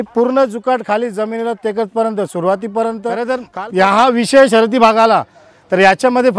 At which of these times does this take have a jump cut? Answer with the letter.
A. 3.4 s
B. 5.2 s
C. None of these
A